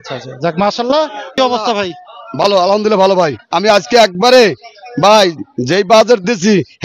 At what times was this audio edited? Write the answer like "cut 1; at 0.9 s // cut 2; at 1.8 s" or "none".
cut 1; at 1.4 s